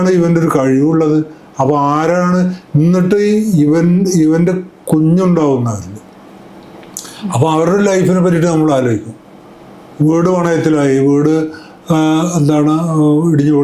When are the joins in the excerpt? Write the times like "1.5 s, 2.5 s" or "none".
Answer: none

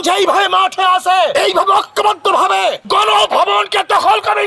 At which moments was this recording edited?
1.3 s, 2.8 s

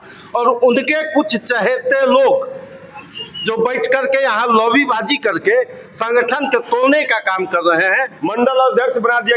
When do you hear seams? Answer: 8.2 s

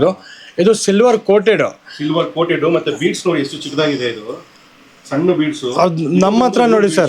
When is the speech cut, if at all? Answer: none

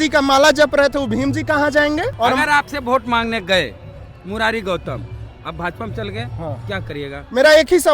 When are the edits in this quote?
2.1 s

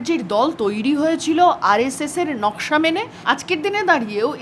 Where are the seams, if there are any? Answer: 3.1 s

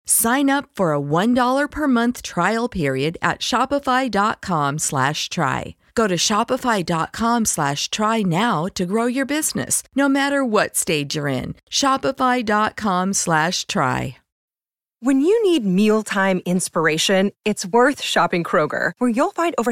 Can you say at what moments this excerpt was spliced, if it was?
14.4 s

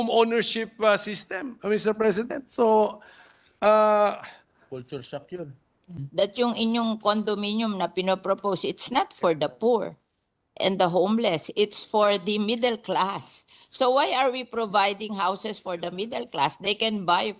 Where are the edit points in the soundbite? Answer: 6.0 s

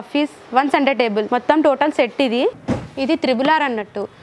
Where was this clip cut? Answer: 1.3 s, 2.6 s

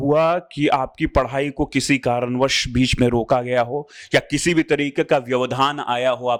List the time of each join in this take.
none

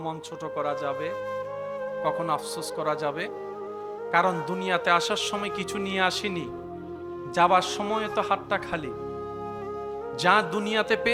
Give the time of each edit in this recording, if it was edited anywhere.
none

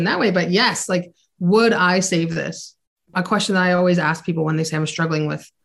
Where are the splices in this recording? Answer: 3.1 s

